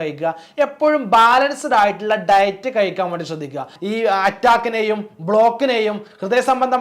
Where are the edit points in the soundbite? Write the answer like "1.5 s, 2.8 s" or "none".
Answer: 3.7 s